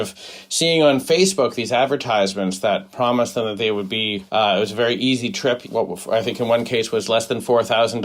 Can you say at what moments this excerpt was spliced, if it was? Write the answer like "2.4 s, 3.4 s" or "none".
none